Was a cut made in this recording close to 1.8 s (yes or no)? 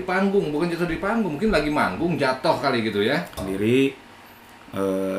no